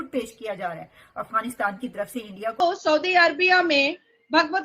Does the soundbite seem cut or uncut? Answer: cut